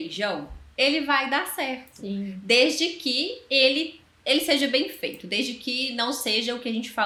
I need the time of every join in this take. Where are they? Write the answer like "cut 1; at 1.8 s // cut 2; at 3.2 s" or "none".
none